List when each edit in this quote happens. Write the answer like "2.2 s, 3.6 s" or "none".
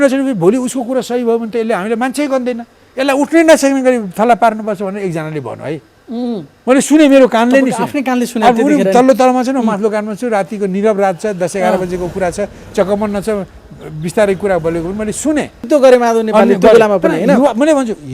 15.6 s